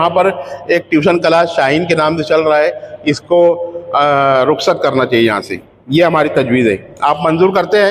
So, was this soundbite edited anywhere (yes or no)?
no